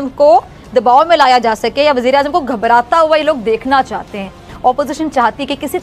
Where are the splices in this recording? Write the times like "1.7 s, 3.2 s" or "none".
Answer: 4.5 s